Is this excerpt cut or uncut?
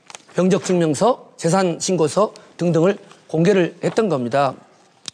uncut